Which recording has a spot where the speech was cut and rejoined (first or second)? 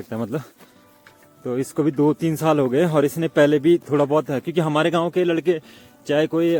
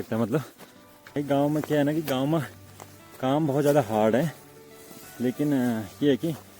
second